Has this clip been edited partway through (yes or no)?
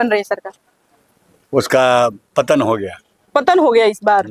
no